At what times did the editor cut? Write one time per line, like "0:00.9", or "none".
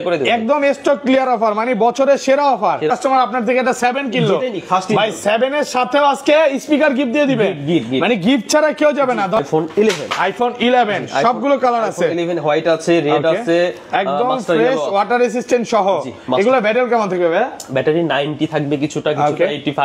0:02.9
0:09.4